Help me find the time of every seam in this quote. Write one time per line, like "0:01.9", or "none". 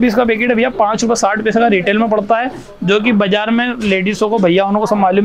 none